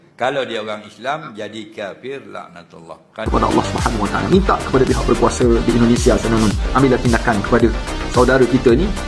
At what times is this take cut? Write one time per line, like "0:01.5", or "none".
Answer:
0:03.3